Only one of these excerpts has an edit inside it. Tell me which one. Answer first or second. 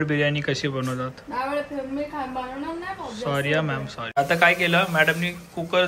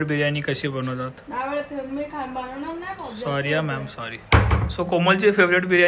first